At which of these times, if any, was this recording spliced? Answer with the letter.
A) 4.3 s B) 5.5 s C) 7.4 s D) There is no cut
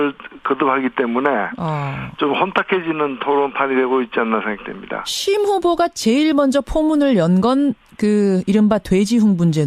D